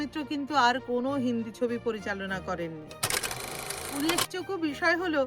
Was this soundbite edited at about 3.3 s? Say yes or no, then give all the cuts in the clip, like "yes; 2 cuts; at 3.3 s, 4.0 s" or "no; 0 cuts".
yes; 1 cut; at 3.3 s